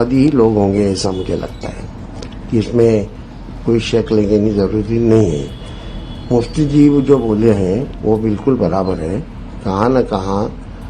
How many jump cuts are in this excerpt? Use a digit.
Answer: 0